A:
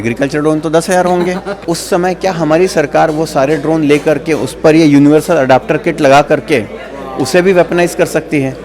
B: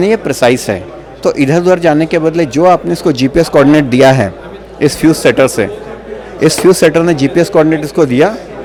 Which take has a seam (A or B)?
A